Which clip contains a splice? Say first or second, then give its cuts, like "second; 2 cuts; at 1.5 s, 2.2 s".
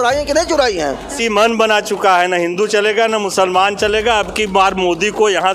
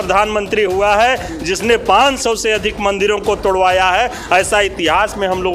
first; 1 cut; at 1.2 s